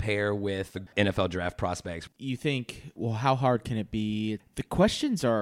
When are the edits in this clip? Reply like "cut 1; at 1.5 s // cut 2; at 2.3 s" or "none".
cut 1; at 0.9 s // cut 2; at 2.0 s // cut 3; at 2.9 s // cut 4; at 4.4 s